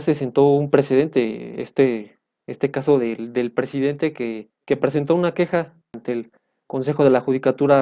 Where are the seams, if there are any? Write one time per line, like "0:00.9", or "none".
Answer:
0:04.5
0:06.0